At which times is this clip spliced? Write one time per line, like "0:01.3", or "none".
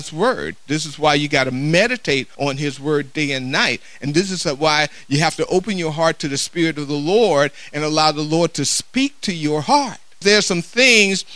0:02.3
0:10.2